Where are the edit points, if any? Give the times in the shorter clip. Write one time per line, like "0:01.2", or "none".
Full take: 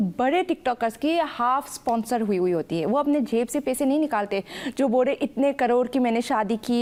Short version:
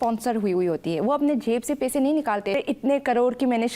0:02.5